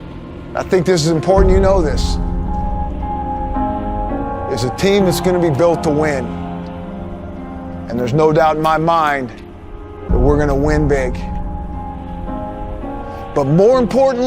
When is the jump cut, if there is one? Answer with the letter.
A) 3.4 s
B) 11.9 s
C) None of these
A